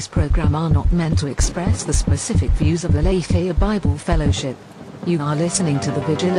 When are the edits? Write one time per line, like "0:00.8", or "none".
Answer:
none